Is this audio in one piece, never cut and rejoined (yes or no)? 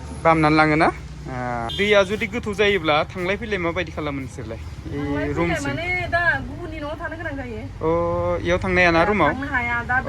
no